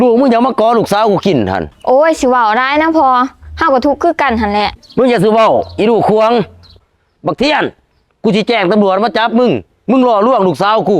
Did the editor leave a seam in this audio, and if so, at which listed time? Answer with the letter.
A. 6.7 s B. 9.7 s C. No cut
A